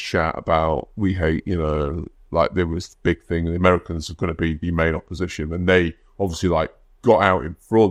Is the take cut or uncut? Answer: uncut